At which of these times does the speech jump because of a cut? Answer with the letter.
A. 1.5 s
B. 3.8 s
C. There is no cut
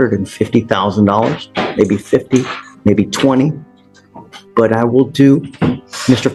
C